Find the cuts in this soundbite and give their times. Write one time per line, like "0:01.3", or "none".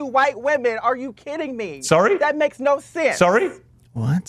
none